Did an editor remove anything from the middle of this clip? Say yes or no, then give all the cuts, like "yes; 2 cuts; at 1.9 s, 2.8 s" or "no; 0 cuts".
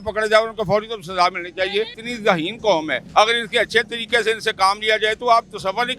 yes; 2 cuts; at 2.0 s, 3.0 s